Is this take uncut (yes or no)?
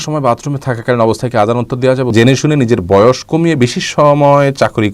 no